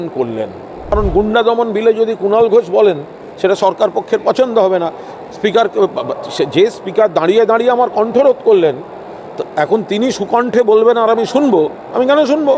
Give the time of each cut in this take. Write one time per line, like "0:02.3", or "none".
0:00.9